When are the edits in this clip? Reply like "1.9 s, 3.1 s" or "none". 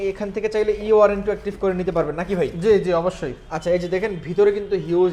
none